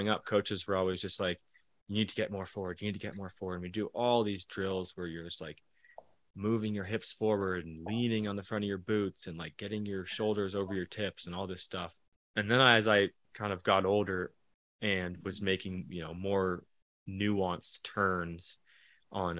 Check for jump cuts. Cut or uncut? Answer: cut